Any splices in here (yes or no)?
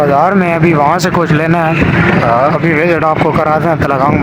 no